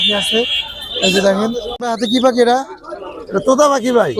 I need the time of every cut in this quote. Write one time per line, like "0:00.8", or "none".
0:01.7